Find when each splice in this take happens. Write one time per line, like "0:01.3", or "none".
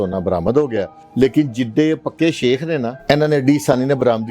0:01.0
0:03.0